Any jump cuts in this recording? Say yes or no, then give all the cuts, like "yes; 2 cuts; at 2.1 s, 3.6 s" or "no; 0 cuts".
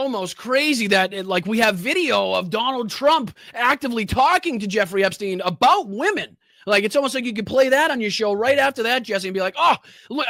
no; 0 cuts